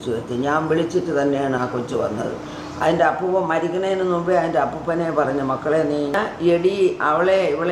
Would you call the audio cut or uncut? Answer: cut